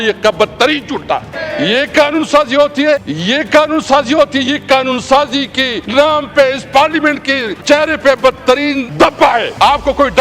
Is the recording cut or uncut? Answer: cut